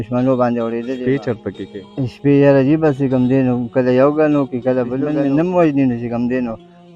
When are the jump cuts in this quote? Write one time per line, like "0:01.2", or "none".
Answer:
0:00.9
0:05.2